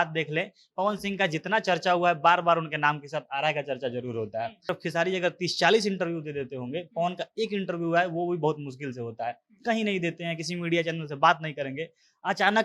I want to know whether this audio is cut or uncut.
cut